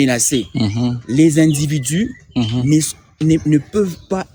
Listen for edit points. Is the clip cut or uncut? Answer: uncut